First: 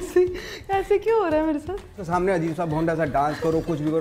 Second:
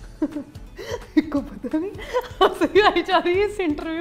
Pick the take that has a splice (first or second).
first